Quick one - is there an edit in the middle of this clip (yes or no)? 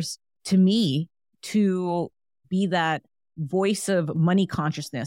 no